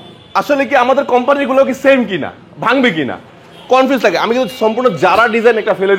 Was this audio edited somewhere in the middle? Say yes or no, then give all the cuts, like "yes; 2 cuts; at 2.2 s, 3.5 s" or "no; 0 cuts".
no; 0 cuts